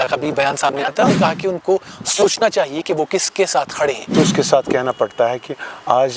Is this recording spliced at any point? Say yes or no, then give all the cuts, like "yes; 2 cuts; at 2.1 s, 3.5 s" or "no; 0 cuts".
yes; 2 cuts; at 1.1 s, 4.1 s